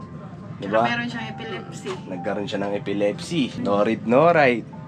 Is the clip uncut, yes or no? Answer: no